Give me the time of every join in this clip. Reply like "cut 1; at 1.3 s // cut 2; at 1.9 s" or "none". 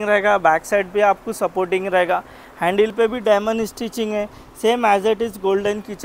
none